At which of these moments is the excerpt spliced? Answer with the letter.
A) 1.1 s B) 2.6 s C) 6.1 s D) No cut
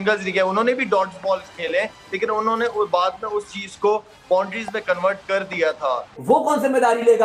C